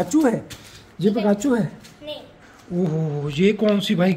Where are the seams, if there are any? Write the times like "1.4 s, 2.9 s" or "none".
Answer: 2.2 s